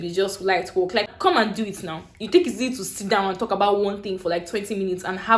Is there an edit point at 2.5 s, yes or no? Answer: no